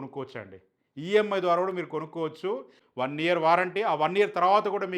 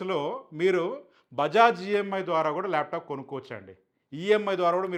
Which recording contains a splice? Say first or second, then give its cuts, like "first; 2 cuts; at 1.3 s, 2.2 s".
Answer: first; 1 cut; at 2.8 s